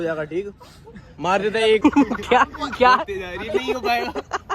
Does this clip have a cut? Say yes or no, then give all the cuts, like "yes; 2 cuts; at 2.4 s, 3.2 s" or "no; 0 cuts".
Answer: yes; 1 cut; at 1.8 s